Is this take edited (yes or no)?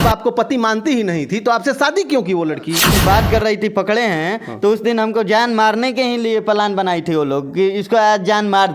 yes